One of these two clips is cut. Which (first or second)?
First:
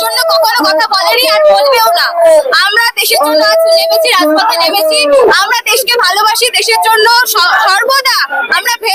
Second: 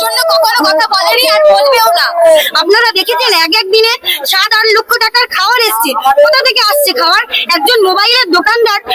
second